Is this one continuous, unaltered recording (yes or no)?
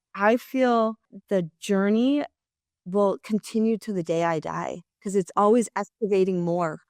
no